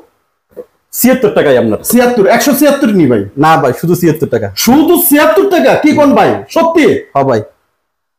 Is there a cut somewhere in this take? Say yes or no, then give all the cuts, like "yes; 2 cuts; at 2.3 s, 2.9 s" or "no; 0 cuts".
no; 0 cuts